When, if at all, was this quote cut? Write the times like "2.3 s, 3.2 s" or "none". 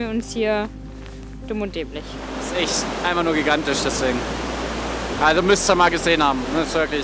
2.1 s